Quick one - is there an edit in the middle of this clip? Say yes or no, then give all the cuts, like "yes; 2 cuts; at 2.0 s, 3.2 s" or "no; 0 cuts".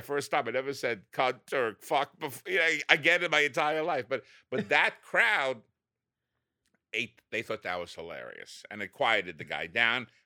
no; 0 cuts